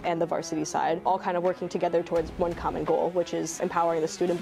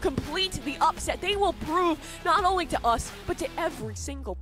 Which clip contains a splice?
first; 2 cuts; at 1.0 s, 3.6 s

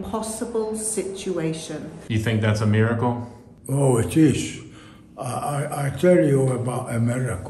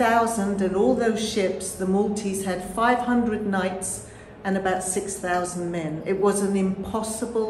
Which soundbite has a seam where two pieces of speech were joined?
first; 1 cut; at 1.9 s

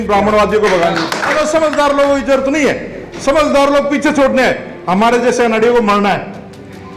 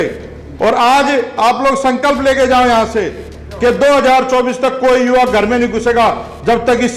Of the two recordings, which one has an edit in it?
first; 1 cut; at 1.4 s

